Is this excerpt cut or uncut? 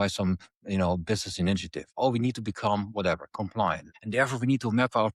cut